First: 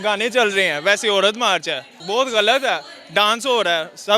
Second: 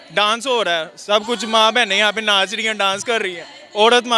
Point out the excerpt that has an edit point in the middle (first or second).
first